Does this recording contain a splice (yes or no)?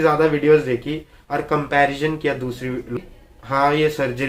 yes